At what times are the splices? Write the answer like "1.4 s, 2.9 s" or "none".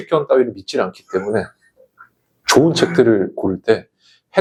none